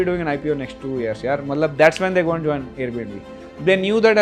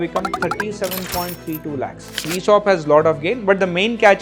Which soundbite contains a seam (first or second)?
second